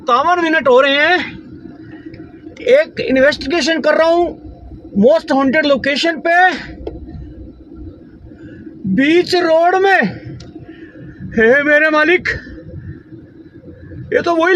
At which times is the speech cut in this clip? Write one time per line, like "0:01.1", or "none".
none

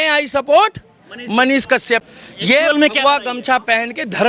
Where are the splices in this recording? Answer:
0:02.0

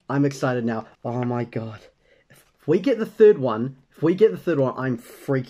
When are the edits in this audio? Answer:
0:00.9

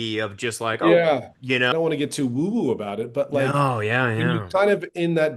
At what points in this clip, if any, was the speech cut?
0:01.7

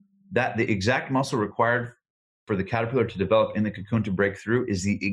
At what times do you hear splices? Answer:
none

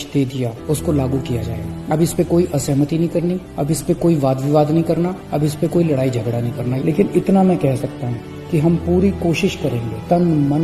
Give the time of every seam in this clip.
0:06.7

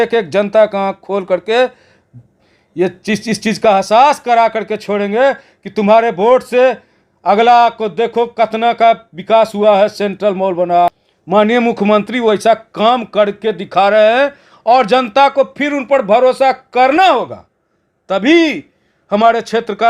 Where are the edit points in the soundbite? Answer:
0:10.9

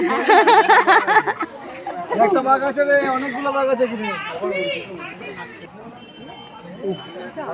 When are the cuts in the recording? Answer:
0:05.6

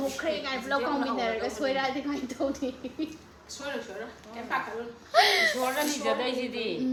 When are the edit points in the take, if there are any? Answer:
none

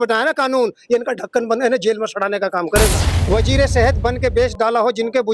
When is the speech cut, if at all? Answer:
0:03.1

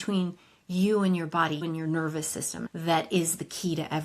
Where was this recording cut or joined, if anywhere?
0:01.6
0:02.7

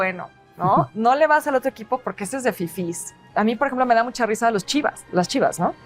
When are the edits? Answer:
0:03.2

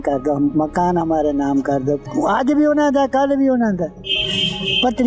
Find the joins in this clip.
0:02.0

